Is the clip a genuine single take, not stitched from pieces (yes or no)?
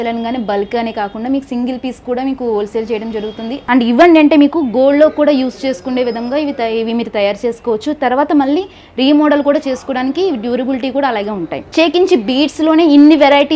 no